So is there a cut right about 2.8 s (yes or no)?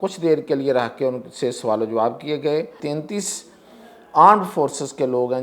yes